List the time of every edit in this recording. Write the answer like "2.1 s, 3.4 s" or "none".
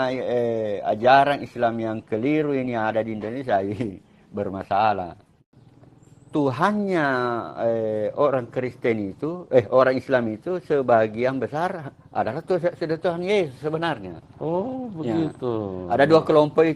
5.4 s